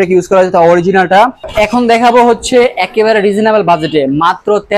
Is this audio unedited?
no; 1 cut; at 1.4 s

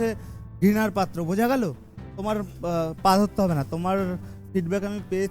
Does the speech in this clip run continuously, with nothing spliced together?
no; 1 cut; at 1.9 s

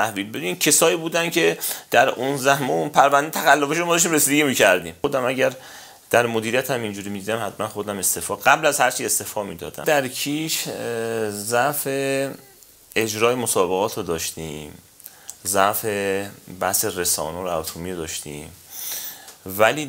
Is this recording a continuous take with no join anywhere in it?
no; 2 cuts; at 4.9 s, 9.8 s

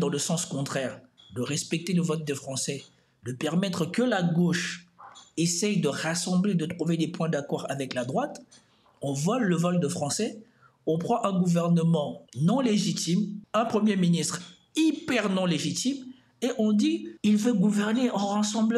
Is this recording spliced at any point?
no; 0 cuts

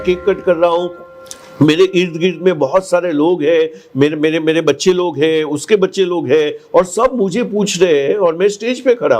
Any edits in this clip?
no; 0 cuts

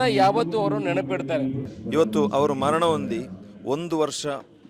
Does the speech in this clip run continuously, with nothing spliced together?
no; 1 cut; at 1.7 s

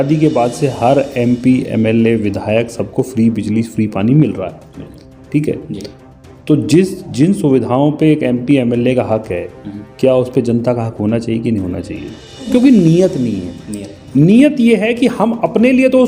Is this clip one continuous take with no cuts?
no; 1 cut; at 12.5 s

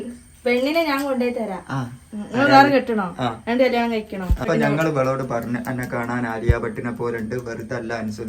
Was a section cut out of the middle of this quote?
yes; 1 cut; at 4.5 s

